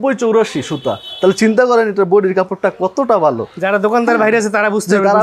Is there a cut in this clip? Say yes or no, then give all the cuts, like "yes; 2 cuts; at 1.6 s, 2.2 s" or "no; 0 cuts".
no; 0 cuts